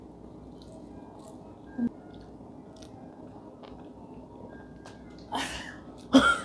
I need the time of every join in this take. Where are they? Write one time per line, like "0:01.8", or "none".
0:01.9